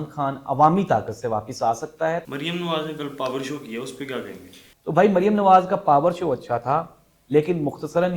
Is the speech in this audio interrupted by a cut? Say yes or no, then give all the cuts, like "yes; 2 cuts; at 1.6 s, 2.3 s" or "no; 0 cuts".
no; 0 cuts